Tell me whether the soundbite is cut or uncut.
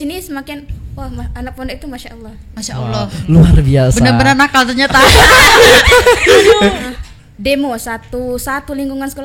cut